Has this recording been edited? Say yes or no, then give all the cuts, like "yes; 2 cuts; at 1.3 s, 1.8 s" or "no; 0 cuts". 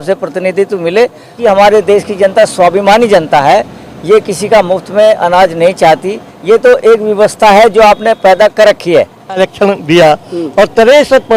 yes; 2 cuts; at 1.3 s, 9.4 s